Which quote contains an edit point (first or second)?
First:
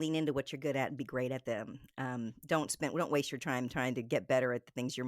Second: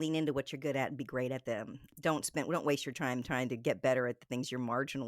second